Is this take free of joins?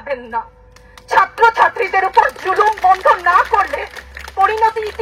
yes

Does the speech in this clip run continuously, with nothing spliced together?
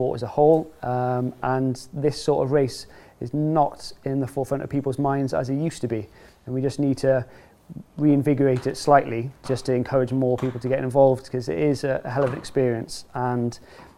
yes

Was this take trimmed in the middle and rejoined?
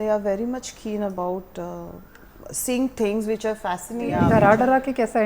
yes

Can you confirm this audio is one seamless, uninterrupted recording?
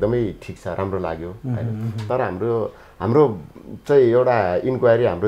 yes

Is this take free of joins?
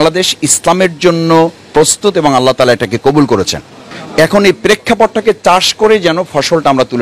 yes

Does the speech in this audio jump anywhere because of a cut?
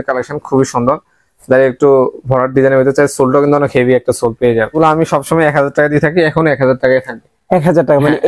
yes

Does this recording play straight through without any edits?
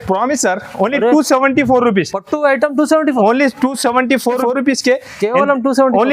no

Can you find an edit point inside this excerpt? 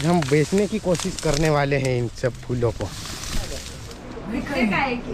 yes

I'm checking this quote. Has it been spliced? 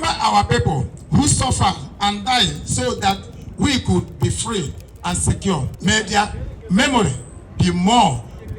yes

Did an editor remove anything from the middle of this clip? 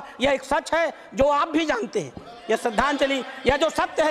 no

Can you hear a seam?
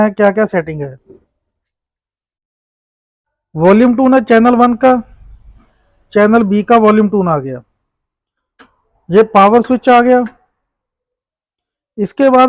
no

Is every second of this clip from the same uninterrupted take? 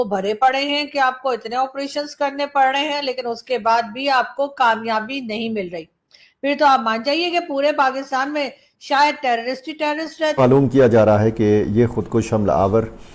no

